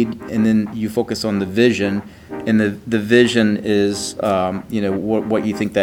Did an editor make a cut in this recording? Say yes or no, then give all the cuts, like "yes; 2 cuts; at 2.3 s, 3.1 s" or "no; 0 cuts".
no; 0 cuts